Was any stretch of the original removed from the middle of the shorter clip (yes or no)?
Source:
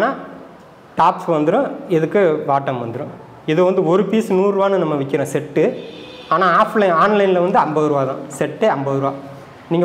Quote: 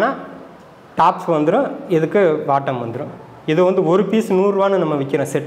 no